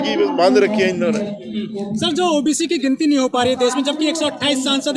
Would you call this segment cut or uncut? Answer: uncut